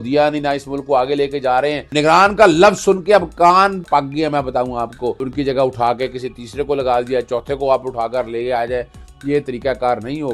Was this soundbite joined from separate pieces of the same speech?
yes; 3 cuts; at 1.9 s, 3.9 s, 5.2 s

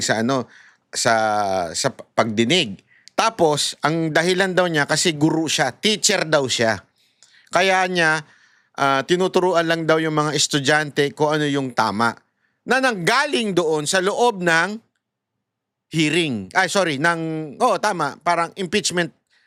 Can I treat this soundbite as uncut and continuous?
yes; 0 cuts

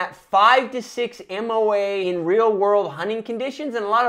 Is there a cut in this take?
yes; 1 cut; at 2.0 s

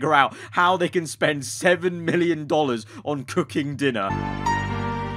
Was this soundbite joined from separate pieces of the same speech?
yes; 1 cut; at 4.1 s

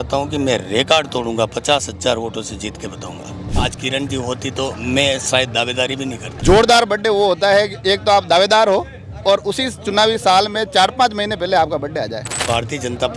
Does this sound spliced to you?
yes; 3 cuts; at 3.5 s, 6.2 s, 12.4 s

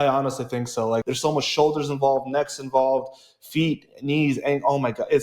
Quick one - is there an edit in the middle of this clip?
yes; 1 cut; at 1.0 s

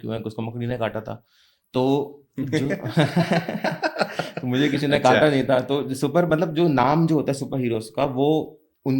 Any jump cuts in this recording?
no; 0 cuts

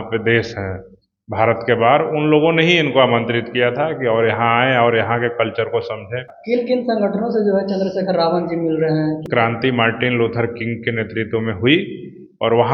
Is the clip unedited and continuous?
no; 2 cuts; at 6.3 s, 9.2 s

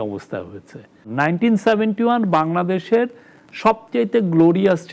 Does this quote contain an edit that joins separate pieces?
yes; 1 cut; at 1.1 s

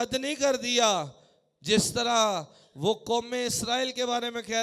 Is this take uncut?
yes; 0 cuts

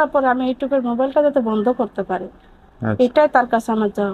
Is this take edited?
no; 0 cuts

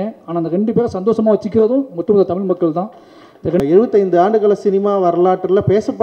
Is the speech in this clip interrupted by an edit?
yes; 1 cut; at 3.6 s

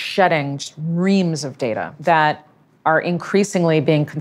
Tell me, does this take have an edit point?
yes; 1 cut; at 1.9 s

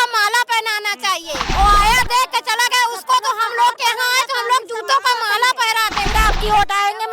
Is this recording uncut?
no; 2 cuts; at 1.5 s, 6.1 s

